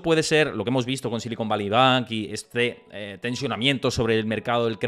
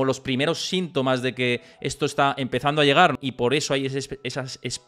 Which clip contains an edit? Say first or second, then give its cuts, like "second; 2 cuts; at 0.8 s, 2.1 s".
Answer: second; 1 cut; at 3.1 s